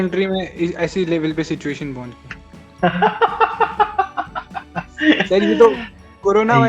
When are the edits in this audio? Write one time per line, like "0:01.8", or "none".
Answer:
none

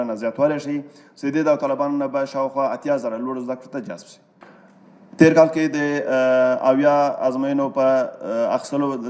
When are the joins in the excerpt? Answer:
none

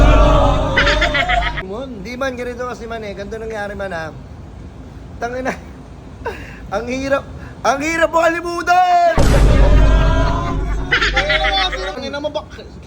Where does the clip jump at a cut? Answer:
0:01.6
0:12.0

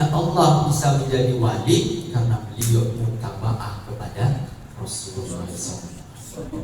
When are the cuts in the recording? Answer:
none

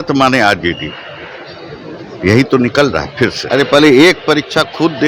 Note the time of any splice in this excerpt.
0:03.4

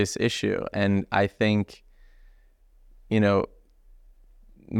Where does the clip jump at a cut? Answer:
none

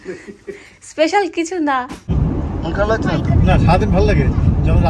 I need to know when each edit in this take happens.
0:02.1

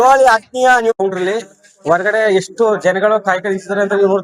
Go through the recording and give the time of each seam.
0:00.9

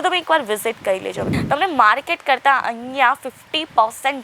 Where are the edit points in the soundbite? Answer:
0:01.3

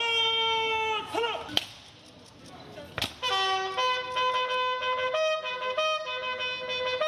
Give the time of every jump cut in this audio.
none

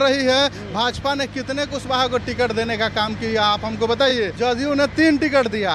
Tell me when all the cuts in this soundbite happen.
0:04.1

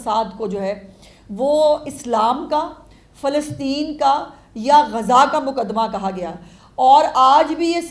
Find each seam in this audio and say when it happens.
none

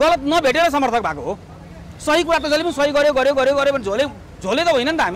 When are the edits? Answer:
none

